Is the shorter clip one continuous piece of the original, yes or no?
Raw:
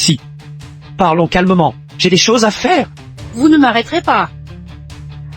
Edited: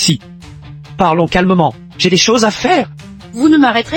yes